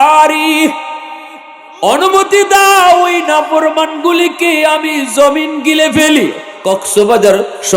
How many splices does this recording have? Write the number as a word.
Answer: one